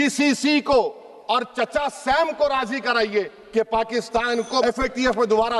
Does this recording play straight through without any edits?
no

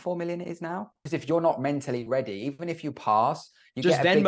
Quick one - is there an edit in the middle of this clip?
yes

